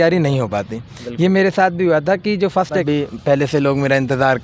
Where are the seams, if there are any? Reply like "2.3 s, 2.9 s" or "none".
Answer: 2.8 s